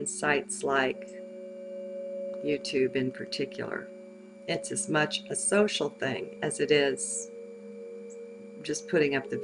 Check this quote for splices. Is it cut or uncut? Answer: cut